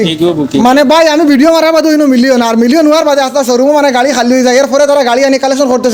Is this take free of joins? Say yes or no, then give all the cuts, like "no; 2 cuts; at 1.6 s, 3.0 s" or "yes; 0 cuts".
yes; 0 cuts